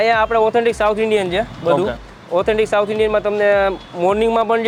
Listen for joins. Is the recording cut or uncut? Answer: uncut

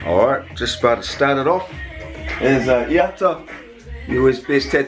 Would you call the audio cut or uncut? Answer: uncut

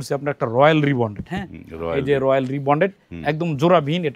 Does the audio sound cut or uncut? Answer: uncut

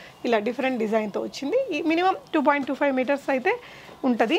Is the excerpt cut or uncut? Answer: uncut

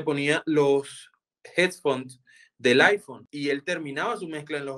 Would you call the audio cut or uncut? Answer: cut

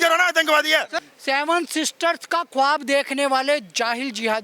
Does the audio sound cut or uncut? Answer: cut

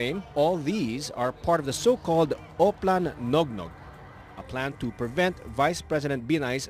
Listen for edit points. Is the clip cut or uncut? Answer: cut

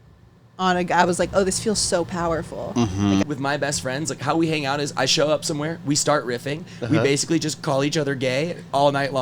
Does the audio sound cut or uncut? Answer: cut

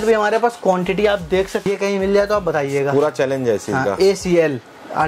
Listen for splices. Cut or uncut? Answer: cut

